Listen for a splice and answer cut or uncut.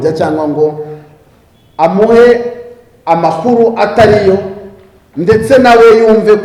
uncut